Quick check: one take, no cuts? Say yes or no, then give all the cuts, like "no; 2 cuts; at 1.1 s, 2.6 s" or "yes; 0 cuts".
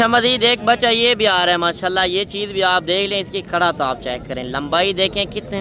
yes; 0 cuts